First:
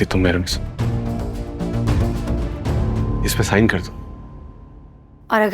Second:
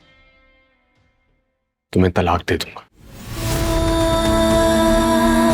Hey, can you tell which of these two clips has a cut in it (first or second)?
first